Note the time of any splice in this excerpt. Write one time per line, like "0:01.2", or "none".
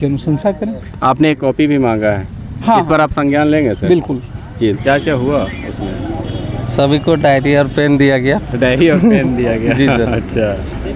0:04.8